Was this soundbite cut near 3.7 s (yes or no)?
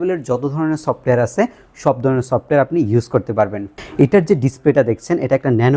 yes